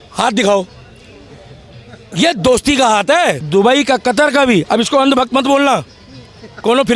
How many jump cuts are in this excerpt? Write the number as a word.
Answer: one